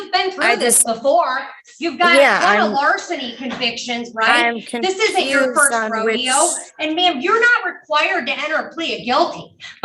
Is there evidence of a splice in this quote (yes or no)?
no